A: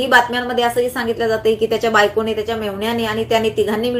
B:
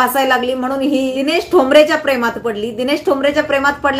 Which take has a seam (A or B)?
B